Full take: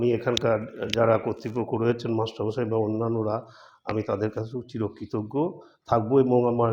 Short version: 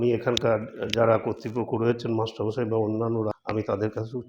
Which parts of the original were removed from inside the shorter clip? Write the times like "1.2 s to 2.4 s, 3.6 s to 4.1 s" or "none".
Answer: 3.3 s to 3.7 s